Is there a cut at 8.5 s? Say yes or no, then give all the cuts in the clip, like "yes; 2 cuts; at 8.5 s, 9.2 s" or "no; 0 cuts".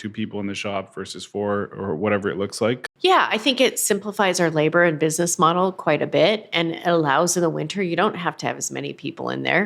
no; 1 cut; at 2.8 s